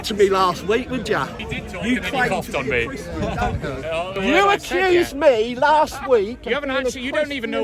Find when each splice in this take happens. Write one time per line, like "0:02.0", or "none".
0:01.4
0:04.2